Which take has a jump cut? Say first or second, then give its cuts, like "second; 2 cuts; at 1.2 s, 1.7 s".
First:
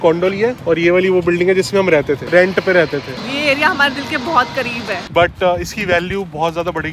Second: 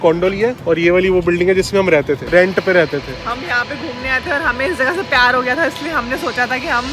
first; 2 cuts; at 3.2 s, 5.0 s